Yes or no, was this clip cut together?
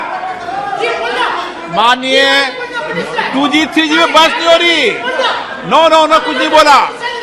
no